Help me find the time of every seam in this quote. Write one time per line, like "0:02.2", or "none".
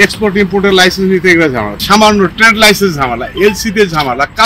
0:01.8